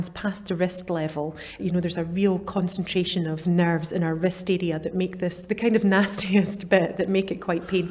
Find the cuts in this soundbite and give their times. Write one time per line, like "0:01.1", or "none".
0:01.6
0:03.4
0:05.4